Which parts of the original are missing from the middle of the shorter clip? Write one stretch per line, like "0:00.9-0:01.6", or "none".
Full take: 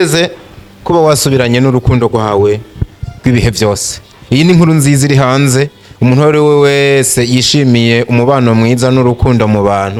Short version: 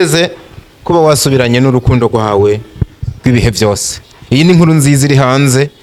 none